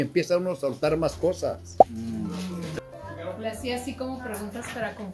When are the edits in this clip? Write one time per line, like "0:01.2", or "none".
0:02.7